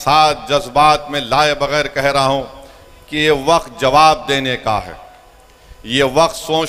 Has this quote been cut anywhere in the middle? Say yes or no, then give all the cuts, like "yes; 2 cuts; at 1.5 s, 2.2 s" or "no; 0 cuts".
no; 0 cuts